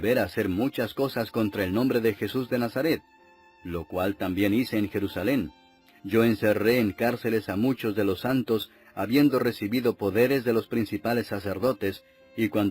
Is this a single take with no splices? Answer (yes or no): no